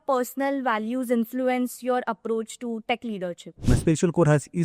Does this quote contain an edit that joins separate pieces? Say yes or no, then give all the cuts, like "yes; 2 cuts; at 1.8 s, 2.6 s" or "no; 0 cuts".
yes; 1 cut; at 3.7 s